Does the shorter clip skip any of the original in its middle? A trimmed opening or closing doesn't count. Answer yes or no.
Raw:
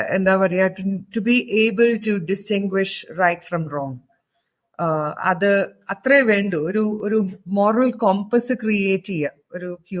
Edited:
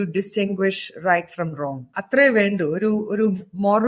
yes